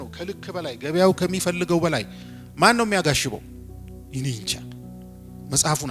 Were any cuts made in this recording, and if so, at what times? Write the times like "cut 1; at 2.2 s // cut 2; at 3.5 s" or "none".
none